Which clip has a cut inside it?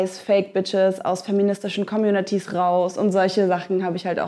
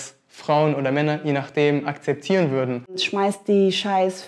second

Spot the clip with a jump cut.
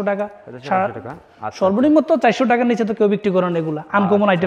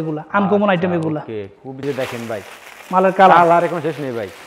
second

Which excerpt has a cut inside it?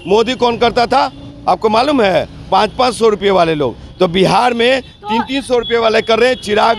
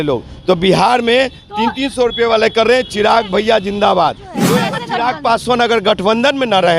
second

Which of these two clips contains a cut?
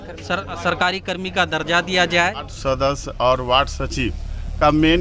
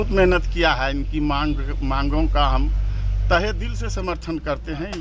first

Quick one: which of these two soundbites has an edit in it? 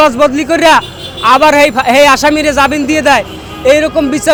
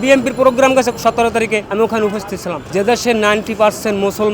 second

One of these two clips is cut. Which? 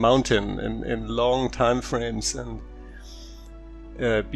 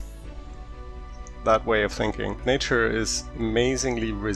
second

